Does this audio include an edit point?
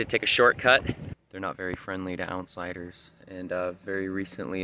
yes; 1 cut; at 1.2 s

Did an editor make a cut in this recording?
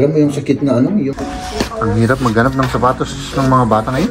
yes; 1 cut; at 1.1 s

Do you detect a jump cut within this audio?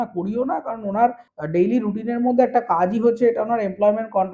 yes; 1 cut; at 1.3 s

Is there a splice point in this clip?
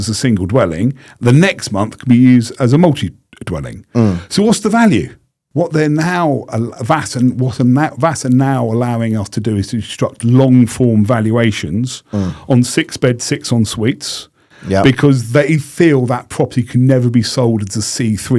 yes; 1 cut; at 5.4 s

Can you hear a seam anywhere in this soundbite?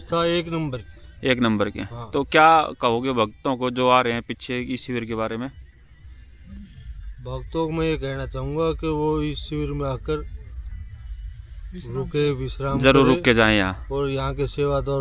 no; 0 cuts

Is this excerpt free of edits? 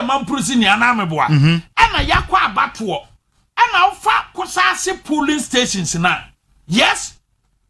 yes; 0 cuts

